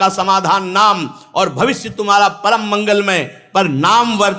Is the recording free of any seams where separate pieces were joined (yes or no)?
yes